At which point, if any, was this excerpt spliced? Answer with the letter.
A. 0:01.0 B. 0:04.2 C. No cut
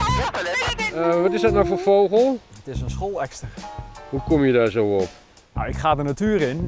A